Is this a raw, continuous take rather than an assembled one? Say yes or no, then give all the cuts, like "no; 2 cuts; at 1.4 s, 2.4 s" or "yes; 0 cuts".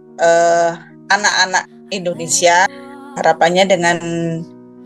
no; 1 cut; at 2.7 s